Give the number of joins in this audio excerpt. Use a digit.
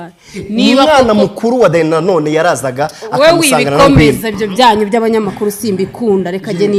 0